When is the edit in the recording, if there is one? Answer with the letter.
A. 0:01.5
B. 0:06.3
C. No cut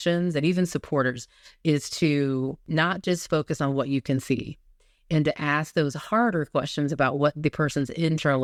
C